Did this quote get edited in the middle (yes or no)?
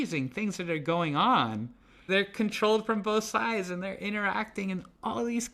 yes